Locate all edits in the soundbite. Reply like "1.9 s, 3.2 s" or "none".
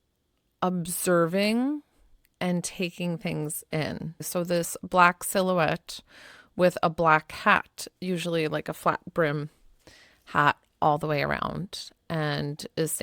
4.2 s